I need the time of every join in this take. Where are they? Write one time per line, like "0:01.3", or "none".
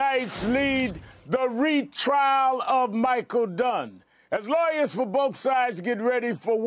none